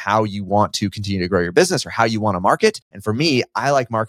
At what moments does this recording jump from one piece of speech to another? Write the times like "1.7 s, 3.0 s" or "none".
2.9 s